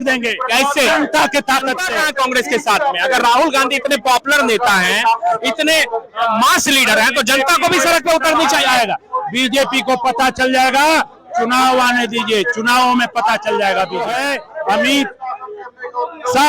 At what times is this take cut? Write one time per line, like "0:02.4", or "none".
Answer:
0:01.9
0:14.3